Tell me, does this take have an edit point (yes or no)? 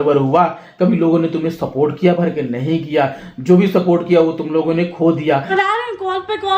yes